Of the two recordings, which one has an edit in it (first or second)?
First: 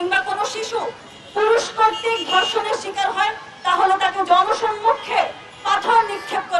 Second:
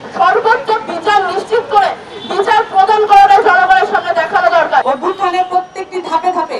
second